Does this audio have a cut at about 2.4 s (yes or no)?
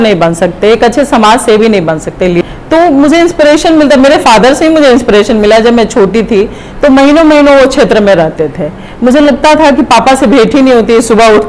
yes